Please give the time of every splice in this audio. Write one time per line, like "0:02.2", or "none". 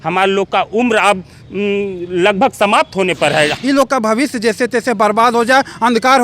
0:03.5

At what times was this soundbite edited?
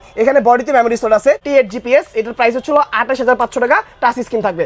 0:01.4

